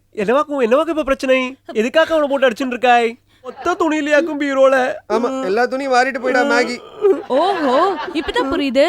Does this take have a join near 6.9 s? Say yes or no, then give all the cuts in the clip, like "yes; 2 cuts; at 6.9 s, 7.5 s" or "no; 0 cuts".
no; 1 cut; at 3.6 s